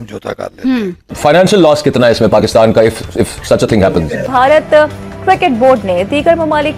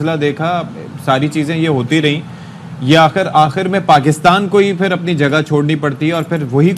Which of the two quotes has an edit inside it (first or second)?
first